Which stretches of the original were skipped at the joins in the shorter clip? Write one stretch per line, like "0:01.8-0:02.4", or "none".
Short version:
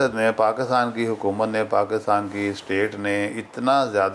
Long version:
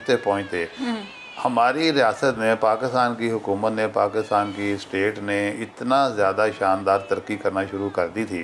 none